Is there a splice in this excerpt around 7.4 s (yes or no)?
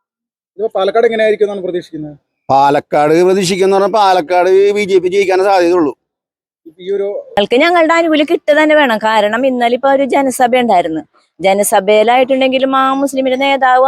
yes